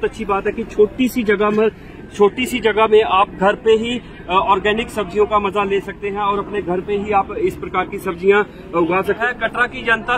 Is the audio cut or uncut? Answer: cut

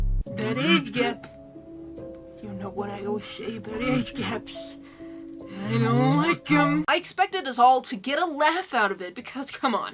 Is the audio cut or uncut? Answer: cut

